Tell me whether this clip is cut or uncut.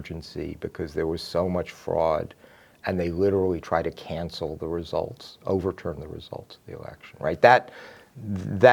uncut